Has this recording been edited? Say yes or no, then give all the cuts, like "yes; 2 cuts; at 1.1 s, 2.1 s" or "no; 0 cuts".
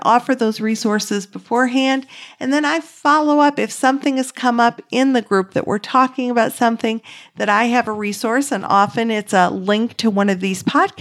no; 0 cuts